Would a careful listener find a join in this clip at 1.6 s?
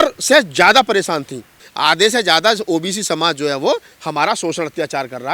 yes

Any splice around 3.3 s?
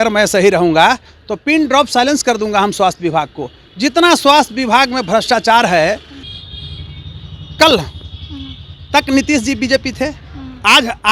no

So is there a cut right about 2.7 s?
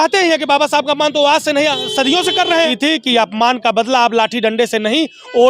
yes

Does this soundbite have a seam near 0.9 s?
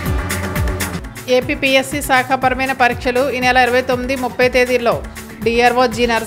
yes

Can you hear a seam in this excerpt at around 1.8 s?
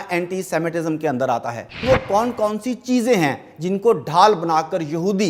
yes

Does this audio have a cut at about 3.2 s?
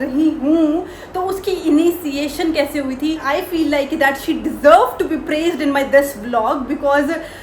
yes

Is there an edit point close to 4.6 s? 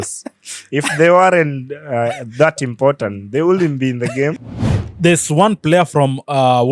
yes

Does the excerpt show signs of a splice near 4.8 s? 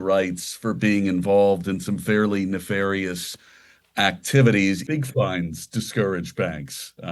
yes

